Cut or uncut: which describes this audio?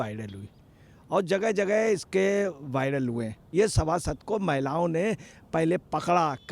cut